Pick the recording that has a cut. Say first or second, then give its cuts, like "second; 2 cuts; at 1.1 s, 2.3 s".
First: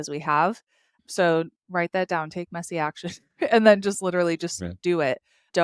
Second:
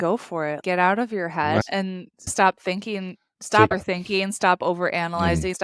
second; 2 cuts; at 1.6 s, 3.7 s